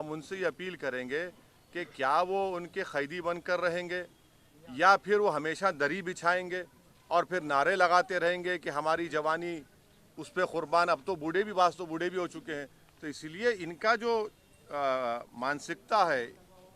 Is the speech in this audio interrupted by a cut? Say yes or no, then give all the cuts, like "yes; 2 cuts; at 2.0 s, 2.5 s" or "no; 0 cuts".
no; 0 cuts